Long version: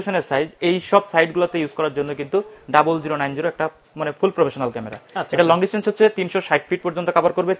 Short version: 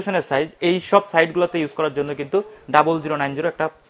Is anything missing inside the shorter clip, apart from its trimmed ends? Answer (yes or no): no